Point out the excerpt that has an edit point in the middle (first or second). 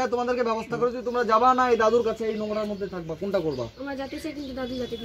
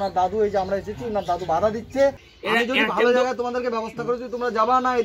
second